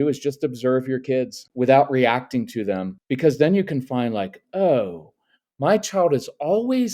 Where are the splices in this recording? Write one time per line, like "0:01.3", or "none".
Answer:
0:01.4
0:03.0